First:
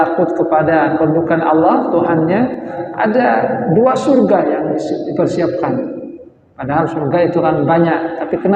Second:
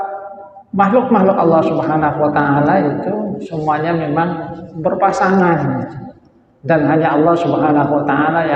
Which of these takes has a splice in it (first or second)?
first